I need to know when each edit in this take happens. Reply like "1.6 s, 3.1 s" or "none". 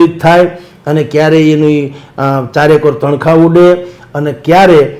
none